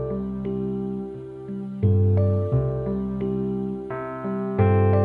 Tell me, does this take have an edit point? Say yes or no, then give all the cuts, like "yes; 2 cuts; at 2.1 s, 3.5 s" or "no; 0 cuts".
no; 0 cuts